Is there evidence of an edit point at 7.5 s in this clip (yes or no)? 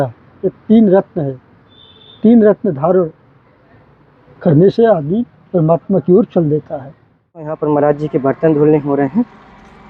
yes